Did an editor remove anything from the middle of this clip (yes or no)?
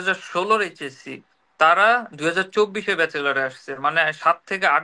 no